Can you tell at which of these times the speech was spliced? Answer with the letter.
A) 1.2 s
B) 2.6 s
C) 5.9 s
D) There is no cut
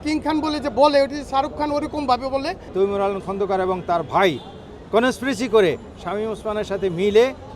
B